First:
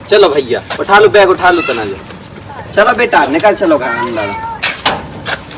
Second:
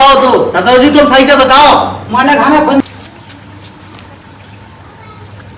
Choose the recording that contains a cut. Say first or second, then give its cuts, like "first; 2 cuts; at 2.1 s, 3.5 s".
second; 1 cut; at 2.8 s